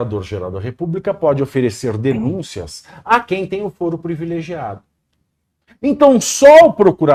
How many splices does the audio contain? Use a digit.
0